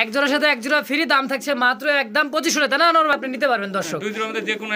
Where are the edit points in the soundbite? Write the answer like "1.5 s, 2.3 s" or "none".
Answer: 3.1 s